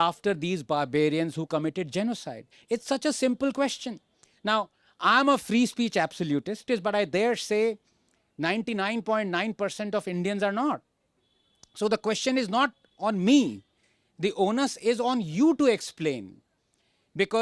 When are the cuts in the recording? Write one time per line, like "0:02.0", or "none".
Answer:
none